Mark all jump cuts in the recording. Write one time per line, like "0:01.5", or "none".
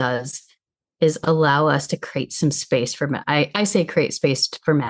none